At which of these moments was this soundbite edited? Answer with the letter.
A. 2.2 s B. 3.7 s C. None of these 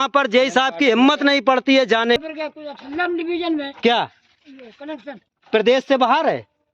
A